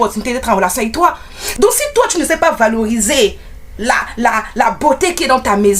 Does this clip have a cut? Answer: yes; 1 cut; at 1.5 s

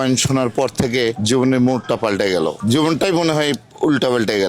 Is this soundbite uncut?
yes; 0 cuts

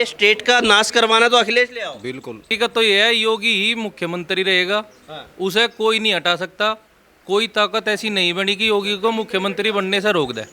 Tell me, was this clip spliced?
yes; 1 cut; at 2.5 s

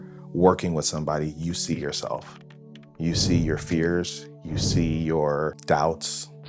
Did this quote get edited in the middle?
yes; 1 cut; at 5.6 s

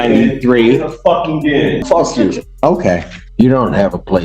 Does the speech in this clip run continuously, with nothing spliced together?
no; 2 cuts; at 1.8 s, 3.1 s

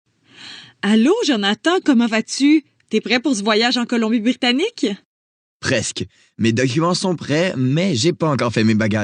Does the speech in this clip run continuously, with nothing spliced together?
no; 1 cut; at 1.6 s

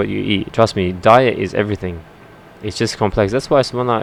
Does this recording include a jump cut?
no; 0 cuts

